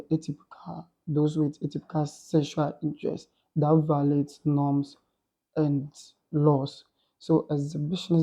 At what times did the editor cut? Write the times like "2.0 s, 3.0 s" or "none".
none